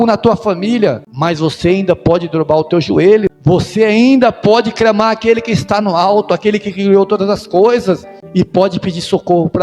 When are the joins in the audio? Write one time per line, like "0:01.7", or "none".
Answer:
0:01.1
0:03.3
0:08.1